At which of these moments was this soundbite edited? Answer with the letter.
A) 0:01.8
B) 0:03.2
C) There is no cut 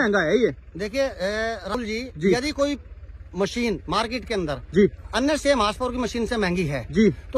A